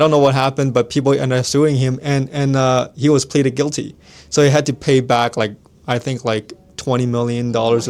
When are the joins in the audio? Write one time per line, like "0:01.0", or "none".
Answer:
none